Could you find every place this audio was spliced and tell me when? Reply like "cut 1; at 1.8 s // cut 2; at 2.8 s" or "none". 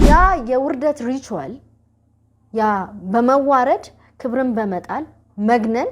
none